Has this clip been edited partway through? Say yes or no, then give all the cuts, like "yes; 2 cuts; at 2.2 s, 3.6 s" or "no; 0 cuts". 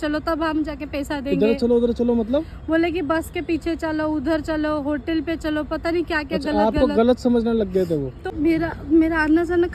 yes; 1 cut; at 8.2 s